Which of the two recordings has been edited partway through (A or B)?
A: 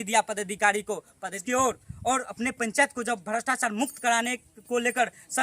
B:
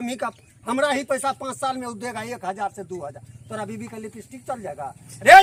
A